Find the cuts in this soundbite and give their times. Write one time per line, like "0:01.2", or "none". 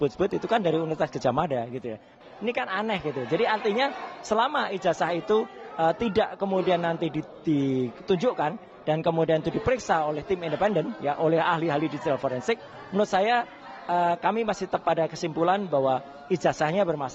0:02.0